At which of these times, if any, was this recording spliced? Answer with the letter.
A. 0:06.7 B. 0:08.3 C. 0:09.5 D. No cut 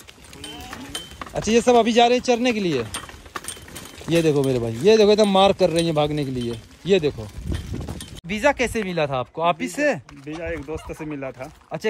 B